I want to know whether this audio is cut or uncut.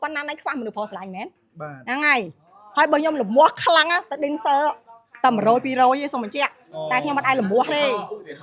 uncut